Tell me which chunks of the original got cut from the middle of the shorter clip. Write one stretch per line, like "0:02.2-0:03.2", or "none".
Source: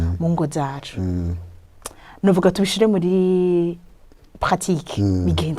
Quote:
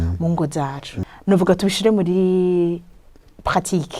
0:00.9-0:01.9